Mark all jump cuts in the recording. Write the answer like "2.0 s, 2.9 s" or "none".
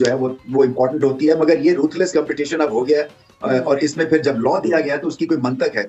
none